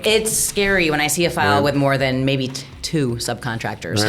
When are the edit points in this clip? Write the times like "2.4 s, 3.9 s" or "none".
none